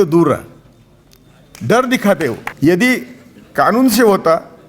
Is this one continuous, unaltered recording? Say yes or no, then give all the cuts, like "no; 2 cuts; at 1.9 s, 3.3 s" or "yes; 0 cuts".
no; 1 cut; at 2.5 s